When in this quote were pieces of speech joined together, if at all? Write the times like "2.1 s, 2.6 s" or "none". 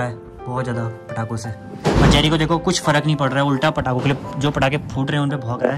none